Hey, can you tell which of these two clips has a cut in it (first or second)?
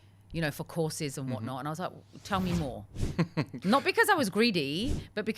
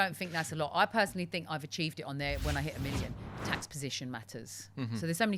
second